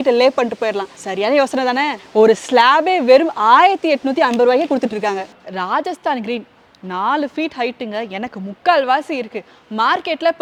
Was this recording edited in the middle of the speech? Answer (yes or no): no